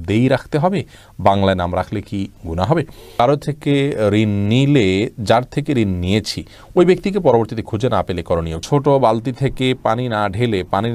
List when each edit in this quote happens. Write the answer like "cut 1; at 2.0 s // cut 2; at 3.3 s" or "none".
cut 1; at 3.2 s // cut 2; at 8.6 s